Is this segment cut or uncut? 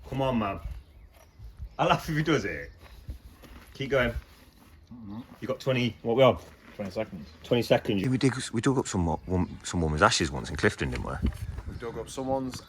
cut